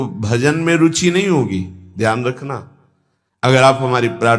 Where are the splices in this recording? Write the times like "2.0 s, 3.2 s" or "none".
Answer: 3.5 s